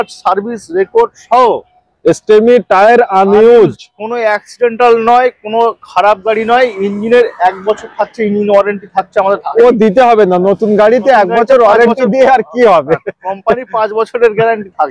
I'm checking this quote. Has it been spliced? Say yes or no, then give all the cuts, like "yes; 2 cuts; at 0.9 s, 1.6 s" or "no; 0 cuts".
no; 0 cuts